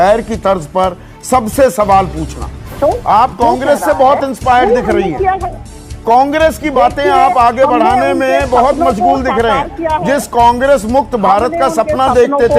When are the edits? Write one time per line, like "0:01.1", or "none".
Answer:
0:02.7